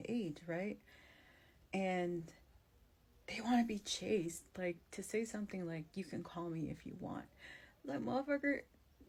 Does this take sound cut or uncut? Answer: uncut